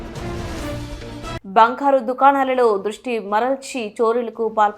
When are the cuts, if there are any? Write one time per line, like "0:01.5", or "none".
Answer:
0:01.4